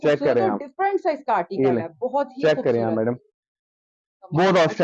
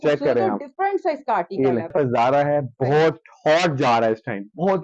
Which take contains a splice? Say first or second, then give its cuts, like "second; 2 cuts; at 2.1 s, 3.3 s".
second; 1 cut; at 1.9 s